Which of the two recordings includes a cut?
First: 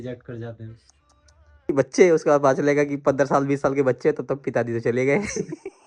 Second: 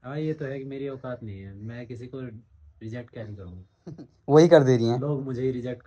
first; 1 cut; at 1.7 s

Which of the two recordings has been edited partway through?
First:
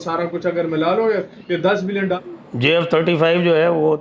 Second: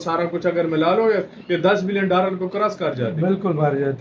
first; 1 cut; at 2.2 s

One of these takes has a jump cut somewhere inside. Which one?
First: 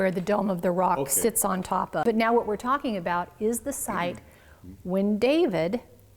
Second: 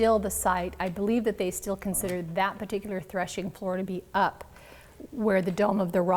first; 1 cut; at 2.1 s

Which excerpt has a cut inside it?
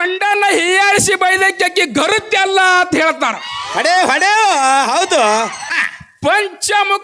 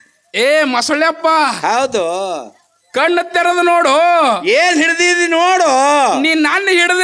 first; 1 cut; at 5.7 s

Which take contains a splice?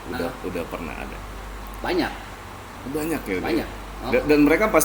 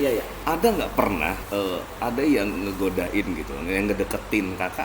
second; 1 cut; at 1.4 s

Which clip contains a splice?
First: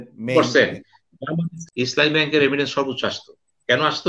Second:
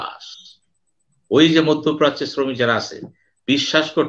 first; 1 cut; at 1.5 s

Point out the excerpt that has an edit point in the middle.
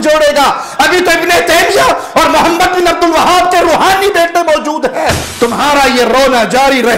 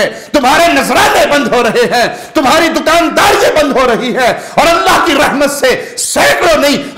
first; 1 cut; at 5.2 s

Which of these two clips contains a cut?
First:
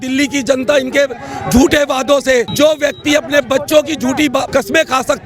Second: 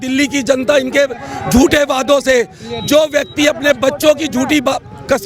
first; 2 cuts; at 2.5 s, 4.5 s

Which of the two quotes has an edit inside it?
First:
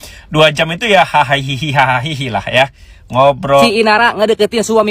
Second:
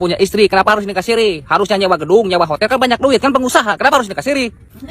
first; 1 cut; at 3.6 s

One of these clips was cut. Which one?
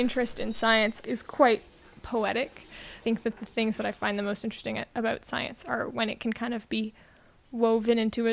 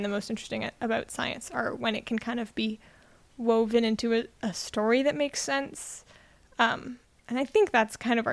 first; 2 cuts; at 1.0 s, 3.0 s

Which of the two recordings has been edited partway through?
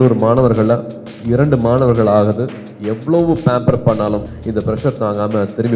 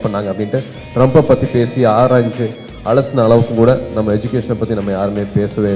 first; 1 cut; at 4.2 s

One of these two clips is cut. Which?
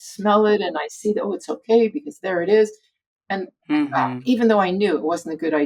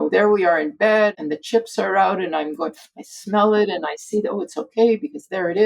second; 1 cut; at 1.2 s

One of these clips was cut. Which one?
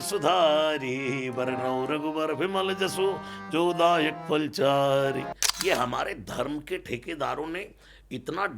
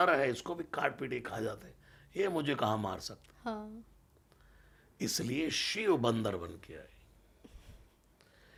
first; 1 cut; at 5.4 s

